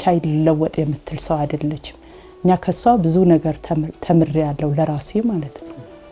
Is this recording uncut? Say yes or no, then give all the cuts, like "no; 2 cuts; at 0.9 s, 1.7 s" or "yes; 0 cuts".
yes; 0 cuts